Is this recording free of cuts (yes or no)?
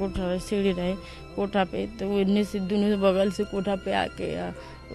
no